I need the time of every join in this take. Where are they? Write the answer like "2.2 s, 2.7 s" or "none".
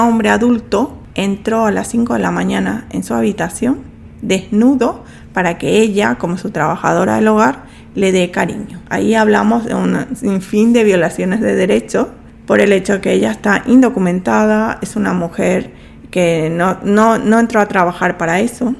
1.0 s